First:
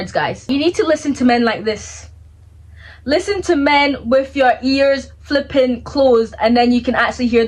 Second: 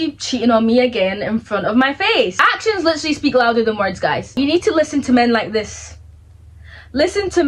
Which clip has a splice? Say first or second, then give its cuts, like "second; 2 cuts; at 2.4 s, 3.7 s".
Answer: second; 1 cut; at 2.4 s